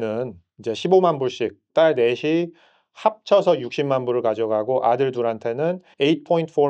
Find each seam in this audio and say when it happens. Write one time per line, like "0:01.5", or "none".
none